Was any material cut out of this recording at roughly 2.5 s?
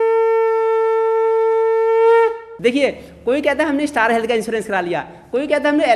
yes; 1 cut; at 2.5 s

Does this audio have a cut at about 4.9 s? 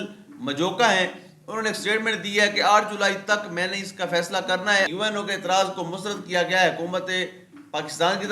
yes; 1 cut; at 4.9 s

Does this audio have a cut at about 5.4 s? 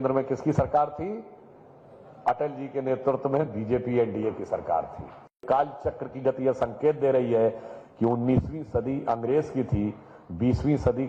yes; 1 cut; at 5.4 s

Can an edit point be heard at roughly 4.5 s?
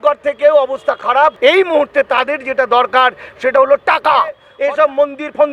yes; 2 cuts; at 1.4 s, 4.5 s

